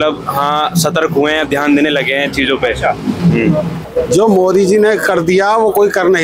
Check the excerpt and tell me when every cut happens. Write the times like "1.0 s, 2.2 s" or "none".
3.8 s